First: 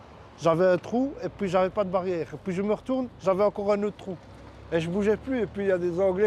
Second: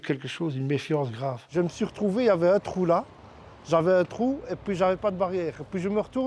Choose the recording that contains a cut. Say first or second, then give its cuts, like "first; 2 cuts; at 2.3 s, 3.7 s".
second; 1 cut; at 1.3 s